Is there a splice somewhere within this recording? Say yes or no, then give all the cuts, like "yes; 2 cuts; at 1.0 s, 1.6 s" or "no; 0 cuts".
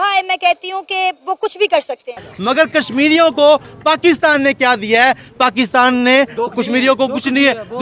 yes; 1 cut; at 2.3 s